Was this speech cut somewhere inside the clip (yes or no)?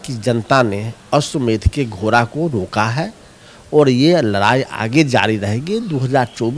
no